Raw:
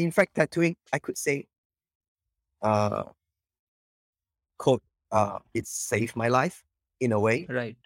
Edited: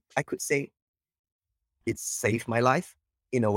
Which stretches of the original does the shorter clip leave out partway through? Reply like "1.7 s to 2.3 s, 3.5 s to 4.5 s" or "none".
2.5 s to 5.4 s